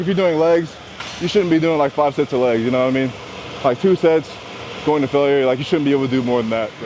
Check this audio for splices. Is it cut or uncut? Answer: uncut